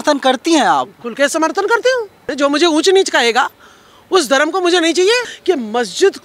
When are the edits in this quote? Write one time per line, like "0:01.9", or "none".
0:02.2
0:05.3